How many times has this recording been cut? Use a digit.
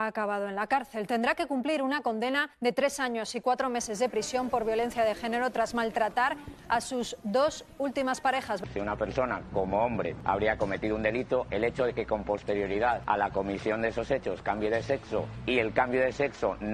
5